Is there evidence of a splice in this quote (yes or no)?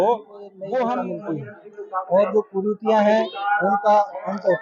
yes